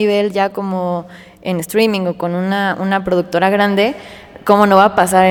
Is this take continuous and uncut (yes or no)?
yes